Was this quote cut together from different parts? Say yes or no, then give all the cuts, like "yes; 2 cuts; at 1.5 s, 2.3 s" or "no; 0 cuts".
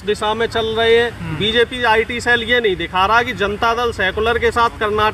no; 0 cuts